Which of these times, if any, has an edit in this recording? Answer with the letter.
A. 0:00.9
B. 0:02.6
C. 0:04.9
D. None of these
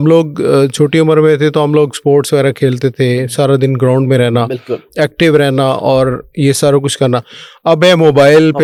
D